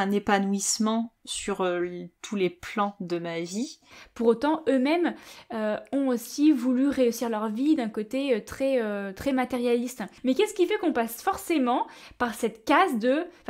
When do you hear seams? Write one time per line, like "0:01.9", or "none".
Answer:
0:04.0
0:10.0